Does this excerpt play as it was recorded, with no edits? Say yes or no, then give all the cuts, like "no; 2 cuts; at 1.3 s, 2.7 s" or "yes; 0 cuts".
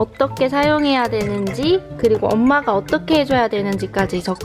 yes; 0 cuts